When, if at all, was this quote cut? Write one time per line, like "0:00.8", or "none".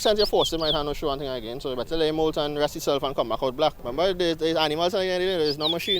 0:03.8